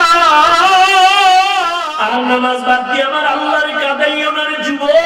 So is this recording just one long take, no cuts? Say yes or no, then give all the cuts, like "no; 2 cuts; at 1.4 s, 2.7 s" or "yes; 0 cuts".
no; 1 cut; at 1.8 s